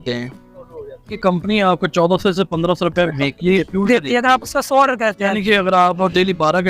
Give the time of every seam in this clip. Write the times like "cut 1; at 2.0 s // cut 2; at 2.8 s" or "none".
cut 1; at 1.1 s // cut 2; at 5.3 s